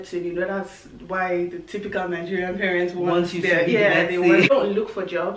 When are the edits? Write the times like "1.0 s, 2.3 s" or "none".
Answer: 4.5 s